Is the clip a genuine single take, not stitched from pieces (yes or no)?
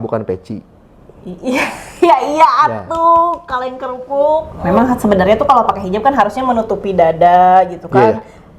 no